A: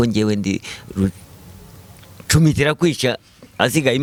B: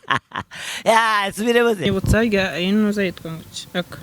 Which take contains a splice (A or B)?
B